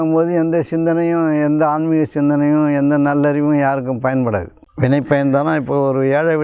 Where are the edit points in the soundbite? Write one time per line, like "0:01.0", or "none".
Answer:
0:04.6